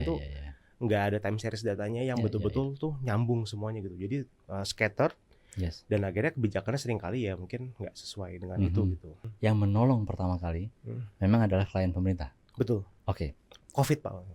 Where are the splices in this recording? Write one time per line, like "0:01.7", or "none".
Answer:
0:09.2

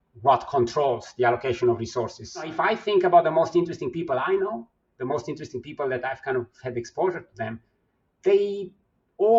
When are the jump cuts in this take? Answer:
0:02.5

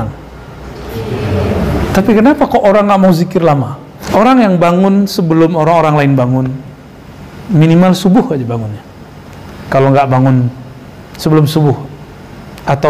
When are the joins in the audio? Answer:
0:03.9

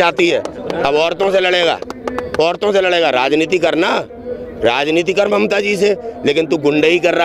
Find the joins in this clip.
none

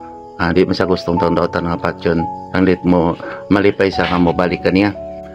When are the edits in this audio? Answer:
none

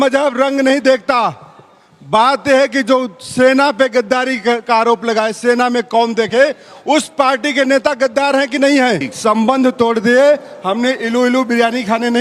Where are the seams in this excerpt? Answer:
0:09.1

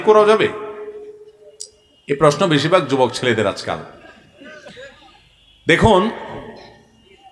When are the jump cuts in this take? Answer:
none

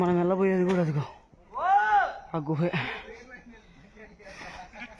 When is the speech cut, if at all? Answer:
none

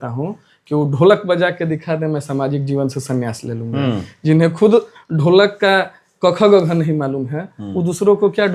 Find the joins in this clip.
none

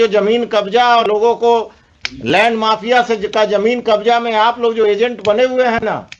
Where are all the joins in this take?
0:01.0

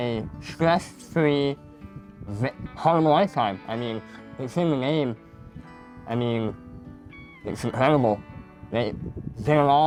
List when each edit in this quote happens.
none

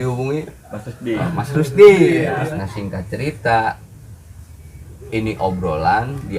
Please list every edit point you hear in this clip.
0:02.4

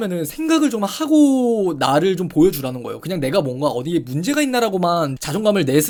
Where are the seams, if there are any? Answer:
none

